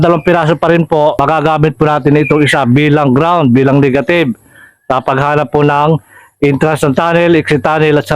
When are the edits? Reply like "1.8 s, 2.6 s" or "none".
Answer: 1.2 s

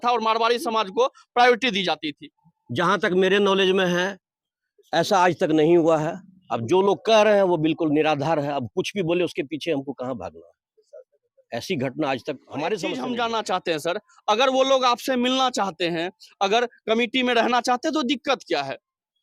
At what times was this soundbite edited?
12.9 s

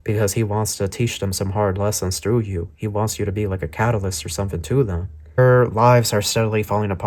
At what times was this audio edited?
5.4 s

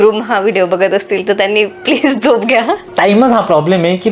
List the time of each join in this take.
2.8 s

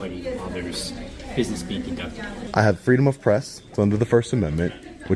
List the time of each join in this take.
2.3 s

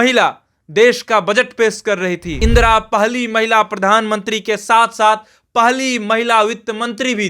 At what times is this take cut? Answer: 2.3 s

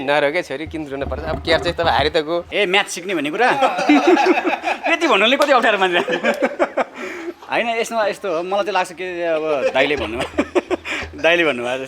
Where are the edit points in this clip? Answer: 2.5 s

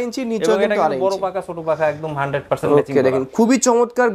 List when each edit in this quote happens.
none

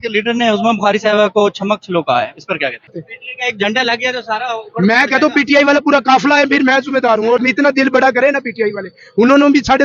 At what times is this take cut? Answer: 2.9 s, 7.4 s

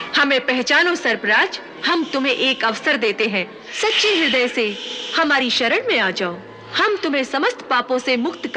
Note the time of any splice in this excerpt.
1.8 s, 3.6 s

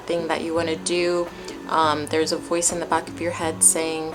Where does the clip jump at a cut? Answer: none

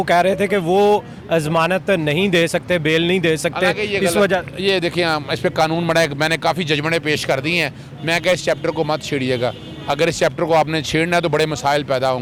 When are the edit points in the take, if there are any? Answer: none

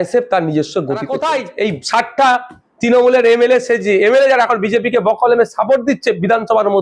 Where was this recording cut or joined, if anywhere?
1.0 s

